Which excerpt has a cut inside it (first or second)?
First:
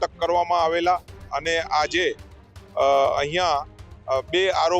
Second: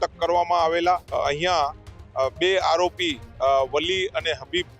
second